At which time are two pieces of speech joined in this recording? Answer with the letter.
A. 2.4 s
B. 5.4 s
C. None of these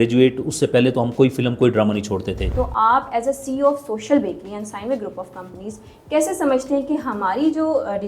A